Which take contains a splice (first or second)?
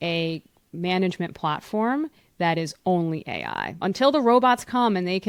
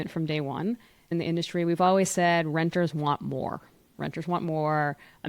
second